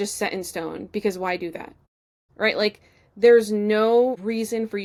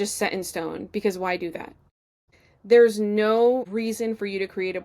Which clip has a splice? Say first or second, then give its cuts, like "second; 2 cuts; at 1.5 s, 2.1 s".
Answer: second; 1 cut; at 2.3 s